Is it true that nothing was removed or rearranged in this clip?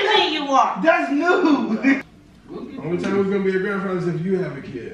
no; 1 cut; at 2.1 s

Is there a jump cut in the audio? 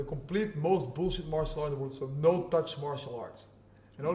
no; 0 cuts

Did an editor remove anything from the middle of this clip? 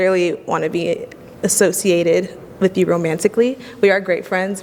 no; 0 cuts

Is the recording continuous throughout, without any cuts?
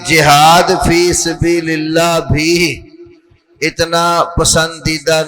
yes; 0 cuts

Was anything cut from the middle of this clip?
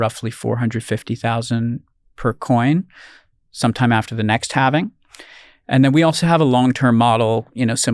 no; 0 cuts

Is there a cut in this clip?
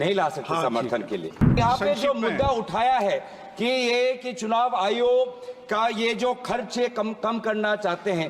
yes; 1 cut; at 1.5 s

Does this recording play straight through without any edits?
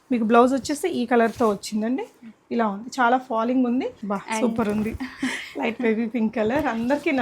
no; 1 cut; at 4.0 s

